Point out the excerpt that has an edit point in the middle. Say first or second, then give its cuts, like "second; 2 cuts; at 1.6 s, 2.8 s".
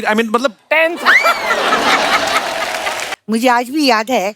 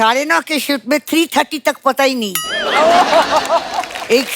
first; 1 cut; at 3.1 s